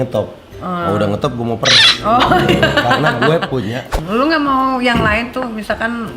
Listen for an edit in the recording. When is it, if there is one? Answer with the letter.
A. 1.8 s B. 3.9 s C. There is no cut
B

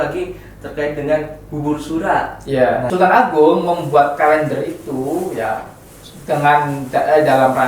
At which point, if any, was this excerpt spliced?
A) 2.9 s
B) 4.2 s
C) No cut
A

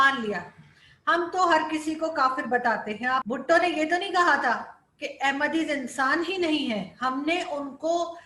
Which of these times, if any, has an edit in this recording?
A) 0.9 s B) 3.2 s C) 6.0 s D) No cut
B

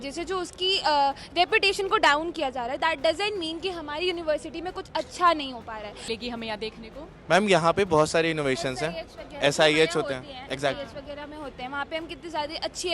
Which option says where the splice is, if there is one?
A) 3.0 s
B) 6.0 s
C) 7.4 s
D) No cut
B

